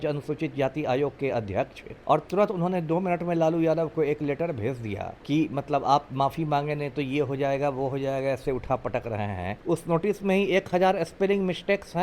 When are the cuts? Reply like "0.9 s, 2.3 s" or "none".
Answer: 1.9 s, 5.1 s, 9.5 s